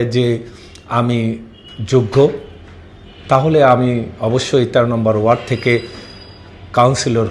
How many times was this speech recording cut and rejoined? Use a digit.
0